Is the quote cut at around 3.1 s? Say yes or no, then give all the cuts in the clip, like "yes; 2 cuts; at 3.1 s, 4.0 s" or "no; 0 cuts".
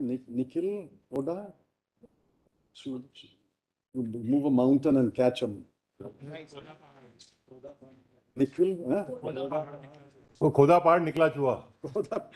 no; 0 cuts